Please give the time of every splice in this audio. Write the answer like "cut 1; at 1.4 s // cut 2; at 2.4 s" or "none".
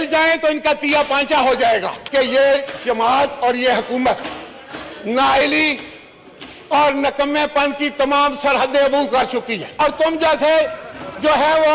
cut 1; at 1.9 s // cut 2; at 9.8 s